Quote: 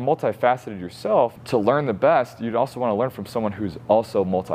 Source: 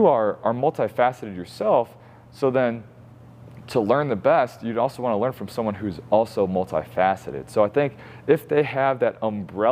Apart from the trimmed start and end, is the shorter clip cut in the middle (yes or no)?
yes